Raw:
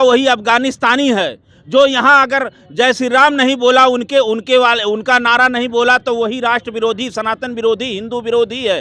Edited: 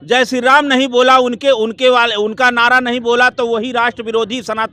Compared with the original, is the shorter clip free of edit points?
yes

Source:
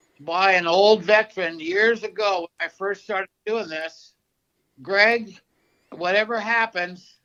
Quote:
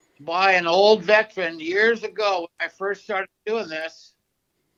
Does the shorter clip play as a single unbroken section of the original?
yes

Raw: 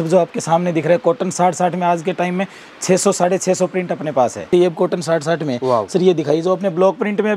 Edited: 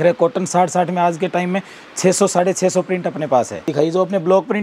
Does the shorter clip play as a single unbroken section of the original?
no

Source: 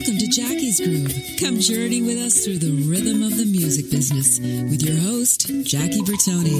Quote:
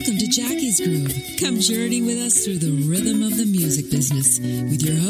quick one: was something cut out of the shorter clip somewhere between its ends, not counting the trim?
no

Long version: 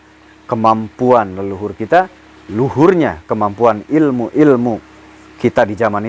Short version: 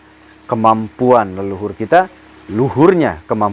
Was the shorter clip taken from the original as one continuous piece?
yes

